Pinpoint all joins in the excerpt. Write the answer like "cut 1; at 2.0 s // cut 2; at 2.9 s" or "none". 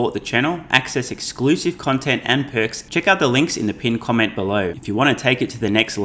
cut 1; at 2.8 s // cut 2; at 4.8 s